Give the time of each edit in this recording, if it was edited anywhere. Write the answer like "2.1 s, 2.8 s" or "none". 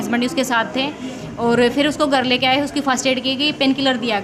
none

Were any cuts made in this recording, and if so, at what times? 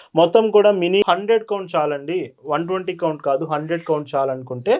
1.0 s

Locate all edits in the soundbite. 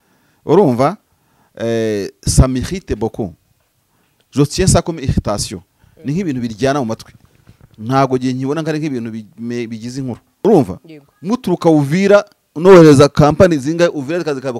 10.3 s

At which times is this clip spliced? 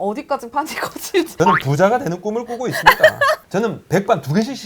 1.3 s, 3.4 s

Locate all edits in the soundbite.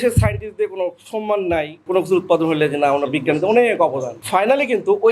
1.8 s, 4.2 s

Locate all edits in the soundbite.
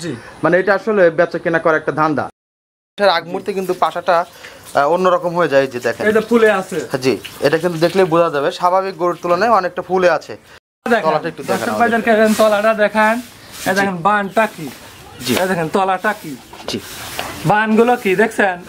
2.5 s, 10.8 s

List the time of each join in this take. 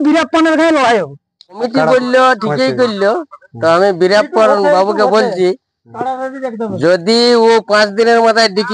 1.5 s

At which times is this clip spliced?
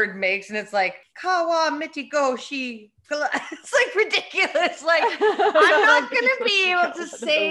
1.1 s

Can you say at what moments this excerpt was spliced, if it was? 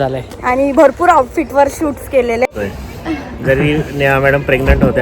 2.5 s

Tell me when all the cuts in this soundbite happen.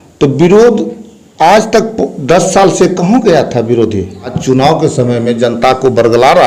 4.4 s

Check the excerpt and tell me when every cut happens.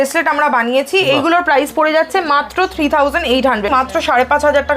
3.7 s

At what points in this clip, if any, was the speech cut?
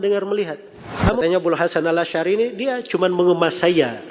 1.2 s

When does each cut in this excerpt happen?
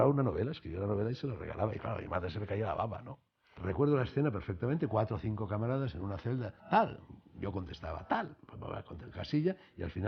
3.4 s

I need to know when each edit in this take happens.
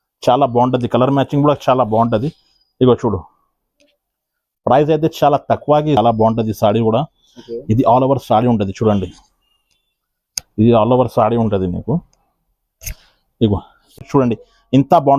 6.0 s, 14.0 s

